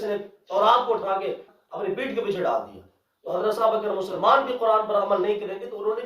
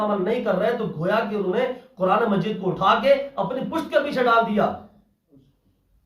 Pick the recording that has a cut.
first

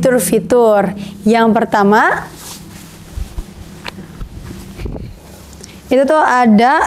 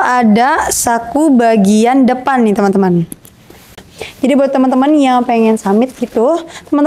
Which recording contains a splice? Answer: second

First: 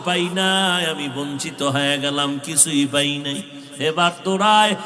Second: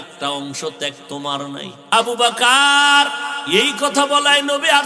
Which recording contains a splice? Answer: second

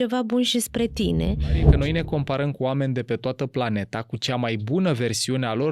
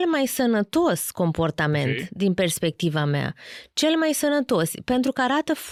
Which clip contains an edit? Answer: first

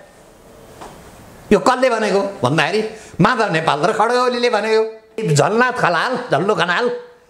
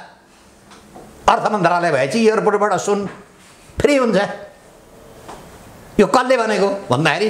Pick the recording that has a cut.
first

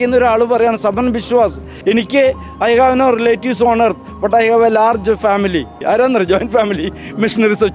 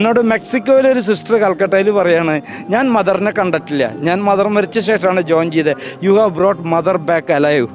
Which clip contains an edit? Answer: first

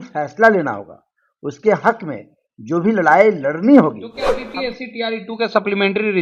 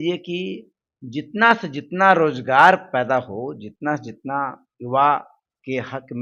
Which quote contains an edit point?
first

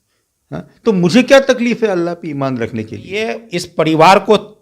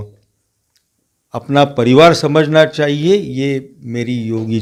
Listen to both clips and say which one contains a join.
first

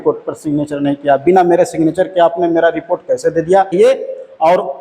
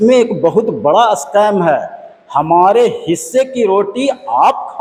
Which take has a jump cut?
first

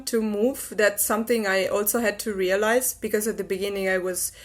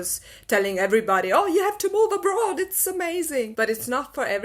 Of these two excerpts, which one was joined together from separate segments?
second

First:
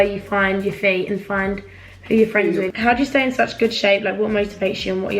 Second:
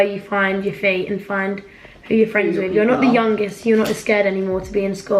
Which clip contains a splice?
first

